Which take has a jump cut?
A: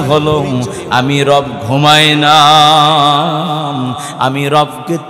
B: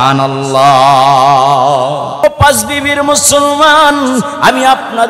B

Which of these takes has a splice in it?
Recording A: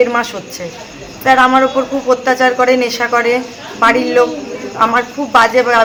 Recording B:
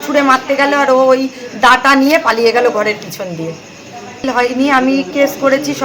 B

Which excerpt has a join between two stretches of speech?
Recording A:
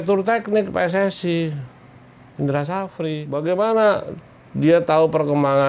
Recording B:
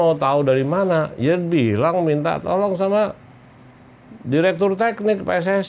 A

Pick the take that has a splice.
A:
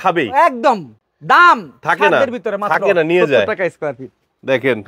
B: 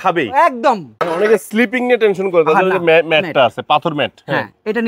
B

